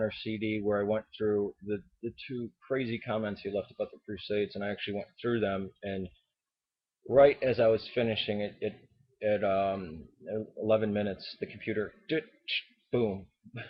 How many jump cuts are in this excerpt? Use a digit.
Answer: 1